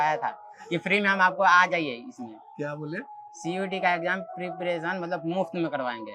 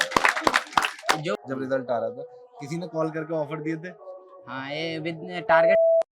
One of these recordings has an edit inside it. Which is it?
second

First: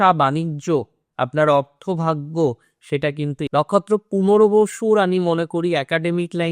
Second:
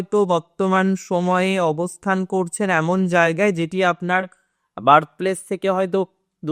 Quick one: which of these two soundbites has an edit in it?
first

